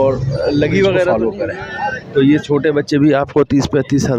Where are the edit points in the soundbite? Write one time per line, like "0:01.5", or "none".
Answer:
0:01.1